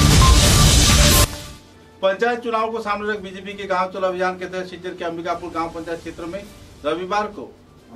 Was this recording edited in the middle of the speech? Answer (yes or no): yes